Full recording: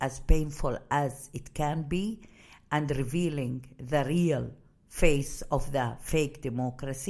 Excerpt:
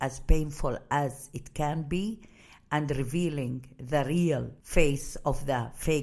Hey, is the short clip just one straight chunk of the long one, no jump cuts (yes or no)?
no